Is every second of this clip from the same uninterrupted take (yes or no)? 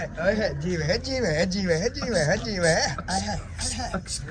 yes